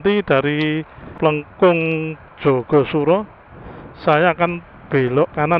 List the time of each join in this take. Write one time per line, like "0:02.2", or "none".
0:01.1